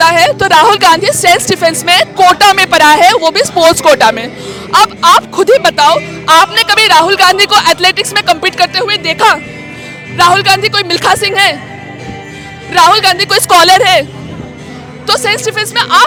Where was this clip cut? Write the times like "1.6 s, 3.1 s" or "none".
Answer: none